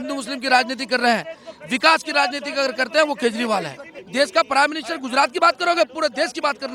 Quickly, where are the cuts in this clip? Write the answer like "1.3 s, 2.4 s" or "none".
4.0 s